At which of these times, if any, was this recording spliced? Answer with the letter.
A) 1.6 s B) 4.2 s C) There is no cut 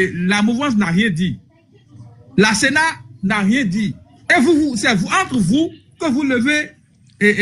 C